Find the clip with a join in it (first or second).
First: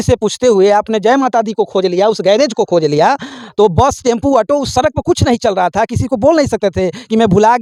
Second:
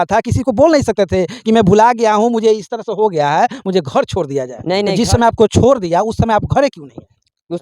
second